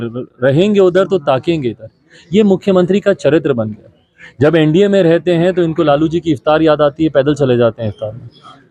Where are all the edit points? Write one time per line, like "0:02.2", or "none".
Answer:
none